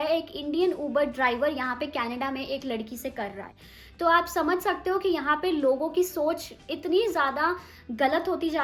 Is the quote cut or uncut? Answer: uncut